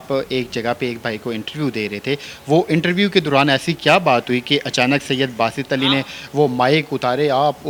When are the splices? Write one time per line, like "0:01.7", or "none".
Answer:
none